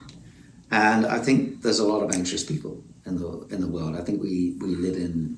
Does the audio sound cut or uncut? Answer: uncut